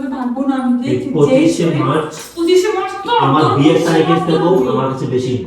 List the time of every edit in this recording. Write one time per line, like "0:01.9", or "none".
none